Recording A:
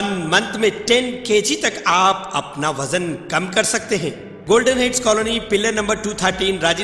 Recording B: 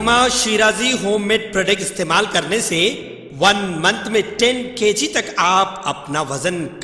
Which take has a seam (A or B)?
A